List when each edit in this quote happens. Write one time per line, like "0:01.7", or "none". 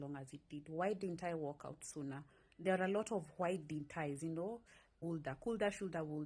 0:04.9